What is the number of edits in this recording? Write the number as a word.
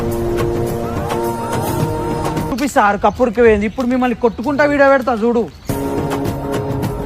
one